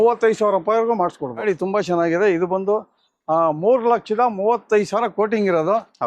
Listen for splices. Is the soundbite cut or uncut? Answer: cut